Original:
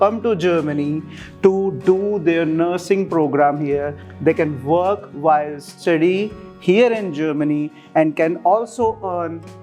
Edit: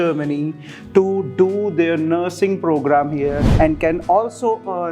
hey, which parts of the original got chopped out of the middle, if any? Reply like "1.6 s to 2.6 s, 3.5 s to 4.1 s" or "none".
3.9 s to 7.8 s